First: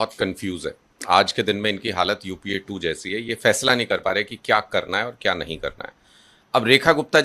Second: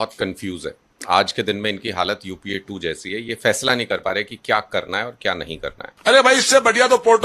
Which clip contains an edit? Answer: second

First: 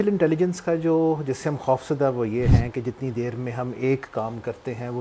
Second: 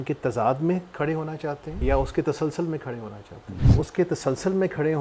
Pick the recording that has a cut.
second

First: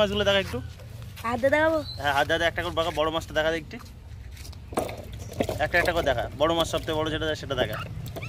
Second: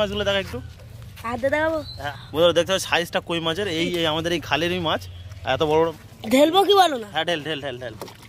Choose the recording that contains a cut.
second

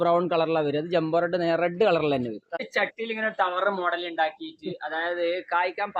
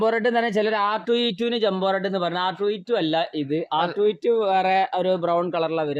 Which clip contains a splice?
first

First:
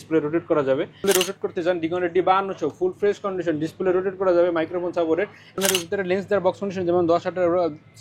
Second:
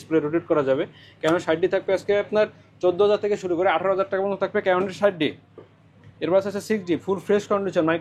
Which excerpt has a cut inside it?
first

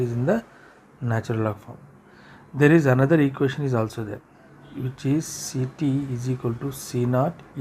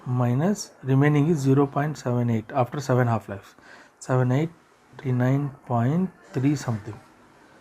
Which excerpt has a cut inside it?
second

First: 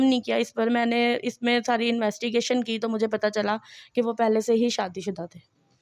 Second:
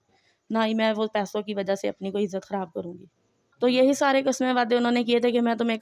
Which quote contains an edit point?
second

